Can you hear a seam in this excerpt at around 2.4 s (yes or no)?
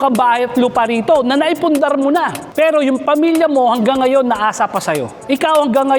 yes